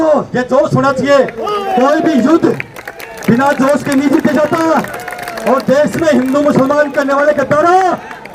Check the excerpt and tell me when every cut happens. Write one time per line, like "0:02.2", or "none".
none